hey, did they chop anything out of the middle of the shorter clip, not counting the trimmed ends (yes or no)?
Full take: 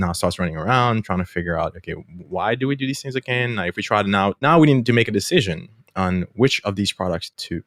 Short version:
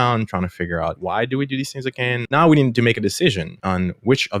yes